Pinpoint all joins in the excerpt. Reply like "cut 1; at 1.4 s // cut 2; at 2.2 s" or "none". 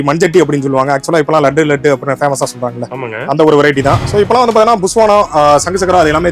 cut 1; at 4.0 s